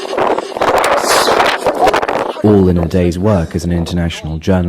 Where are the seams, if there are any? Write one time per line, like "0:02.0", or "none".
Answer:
0:02.2